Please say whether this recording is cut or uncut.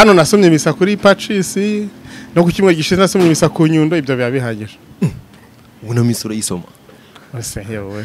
uncut